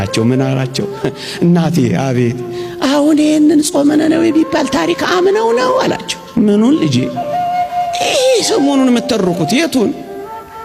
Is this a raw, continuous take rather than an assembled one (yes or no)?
yes